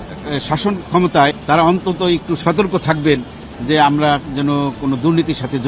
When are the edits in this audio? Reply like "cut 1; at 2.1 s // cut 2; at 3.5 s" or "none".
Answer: cut 1; at 1.4 s // cut 2; at 4.3 s

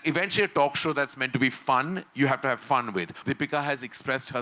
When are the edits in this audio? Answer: cut 1; at 3.2 s

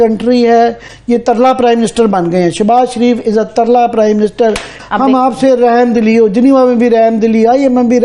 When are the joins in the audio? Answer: cut 1; at 4.7 s

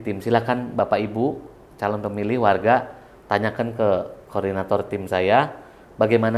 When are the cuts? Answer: none

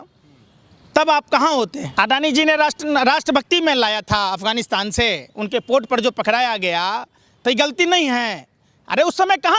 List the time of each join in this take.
cut 1; at 1.8 s

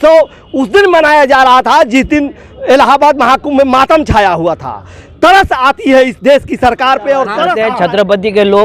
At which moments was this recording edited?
cut 1; at 7.5 s

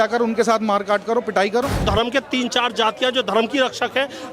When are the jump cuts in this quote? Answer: cut 1; at 1.8 s

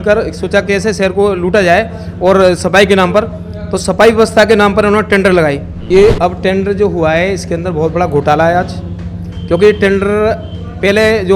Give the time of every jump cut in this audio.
cut 1; at 5.7 s

